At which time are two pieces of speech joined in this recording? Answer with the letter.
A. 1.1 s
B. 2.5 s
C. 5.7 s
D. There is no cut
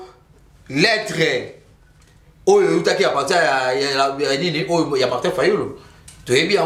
D